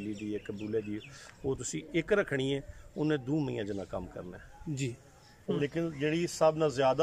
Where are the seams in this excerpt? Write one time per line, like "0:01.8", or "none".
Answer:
0:05.5